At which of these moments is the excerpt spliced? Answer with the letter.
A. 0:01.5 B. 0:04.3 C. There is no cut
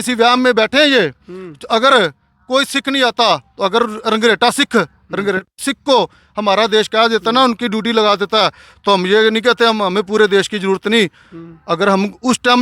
C